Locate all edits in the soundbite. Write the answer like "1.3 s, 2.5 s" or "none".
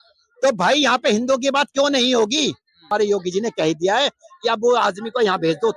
2.9 s